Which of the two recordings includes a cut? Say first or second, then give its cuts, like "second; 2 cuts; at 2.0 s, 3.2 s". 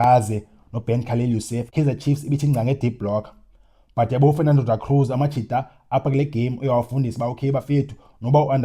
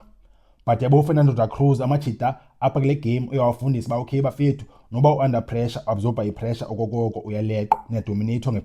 first; 1 cut; at 2.1 s